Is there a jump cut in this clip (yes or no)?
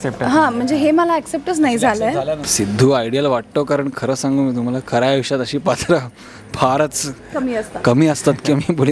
yes